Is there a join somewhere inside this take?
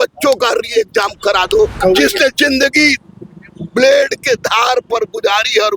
yes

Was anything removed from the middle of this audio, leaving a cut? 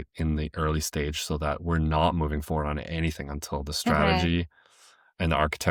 no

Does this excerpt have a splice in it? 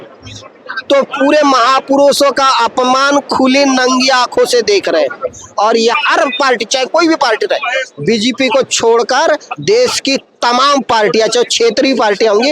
yes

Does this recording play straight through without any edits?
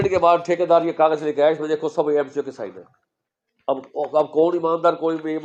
yes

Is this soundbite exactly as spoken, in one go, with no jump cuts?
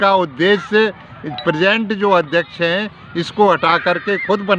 yes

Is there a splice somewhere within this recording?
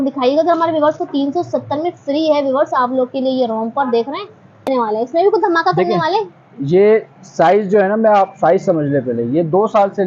yes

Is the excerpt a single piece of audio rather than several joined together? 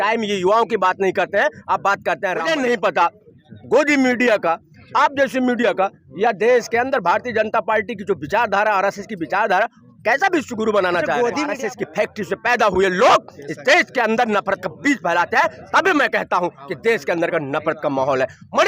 no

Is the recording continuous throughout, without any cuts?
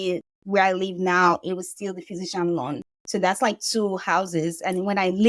yes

